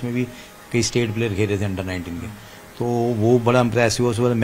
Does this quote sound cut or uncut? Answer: uncut